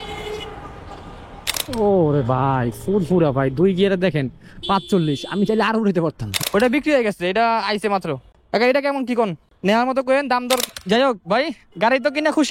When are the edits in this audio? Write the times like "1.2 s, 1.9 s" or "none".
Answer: 1.7 s, 6.5 s, 10.7 s